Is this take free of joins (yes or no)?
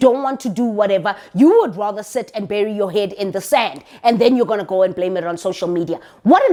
yes